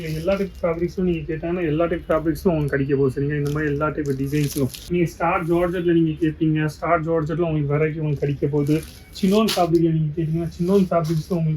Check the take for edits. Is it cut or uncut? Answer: cut